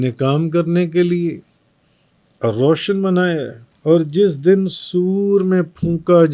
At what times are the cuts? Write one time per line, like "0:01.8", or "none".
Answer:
0:03.7